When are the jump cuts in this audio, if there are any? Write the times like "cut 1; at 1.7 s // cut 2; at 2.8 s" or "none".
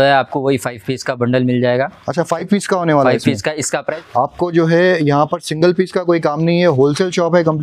cut 1; at 4.0 s

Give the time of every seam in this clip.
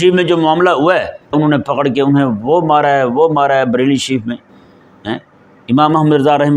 cut 1; at 1.3 s

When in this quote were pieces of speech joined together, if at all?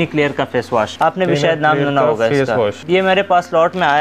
cut 1; at 0.9 s // cut 2; at 2.8 s

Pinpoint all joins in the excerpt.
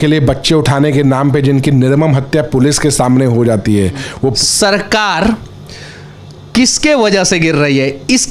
cut 1; at 4.4 s

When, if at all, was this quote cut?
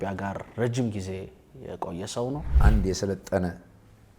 cut 1; at 2.5 s

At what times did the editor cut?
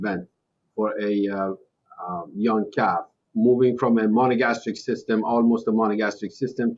cut 1; at 3.2 s

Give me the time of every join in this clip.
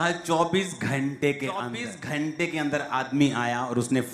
cut 1; at 1.8 s

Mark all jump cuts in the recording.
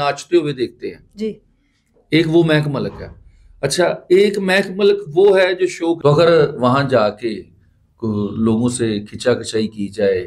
cut 1; at 6.0 s

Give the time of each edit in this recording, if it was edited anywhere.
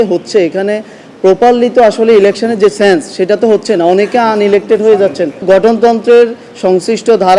cut 1; at 5.4 s

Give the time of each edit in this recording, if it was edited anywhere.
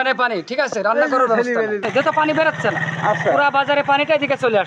cut 1; at 2.1 s

